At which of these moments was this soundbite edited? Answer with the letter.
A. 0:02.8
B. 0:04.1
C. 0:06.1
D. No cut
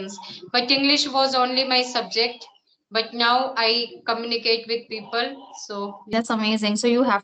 C